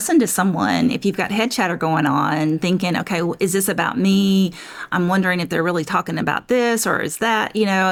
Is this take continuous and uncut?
yes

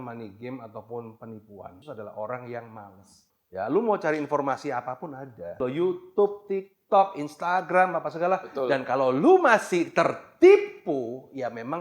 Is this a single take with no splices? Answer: no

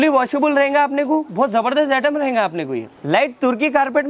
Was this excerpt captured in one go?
no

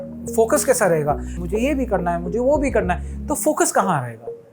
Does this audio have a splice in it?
yes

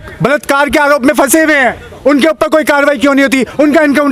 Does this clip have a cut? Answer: no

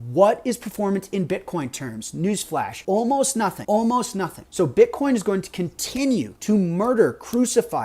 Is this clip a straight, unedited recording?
no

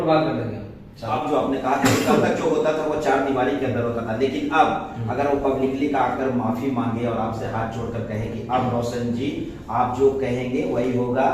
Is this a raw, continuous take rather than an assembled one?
no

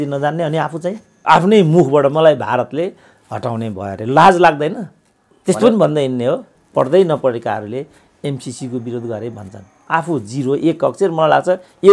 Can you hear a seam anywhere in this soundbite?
yes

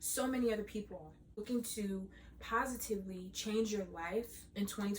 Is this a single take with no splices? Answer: no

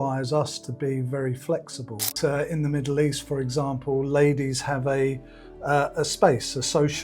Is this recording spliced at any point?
yes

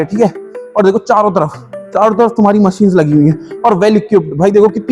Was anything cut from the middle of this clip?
no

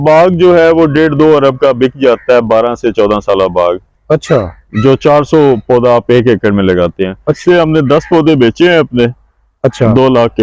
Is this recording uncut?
no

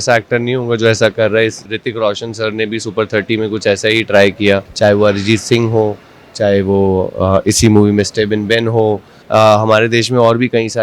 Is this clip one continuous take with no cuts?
no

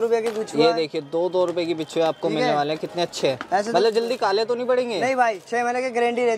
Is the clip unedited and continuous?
yes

